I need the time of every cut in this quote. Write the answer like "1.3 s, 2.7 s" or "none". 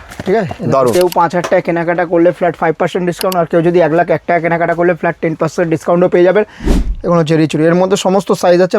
0.9 s, 6.6 s